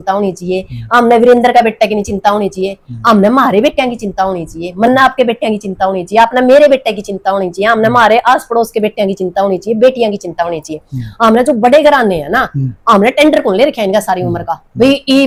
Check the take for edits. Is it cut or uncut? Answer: uncut